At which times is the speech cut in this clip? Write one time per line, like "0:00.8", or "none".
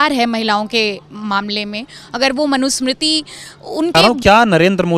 0:03.9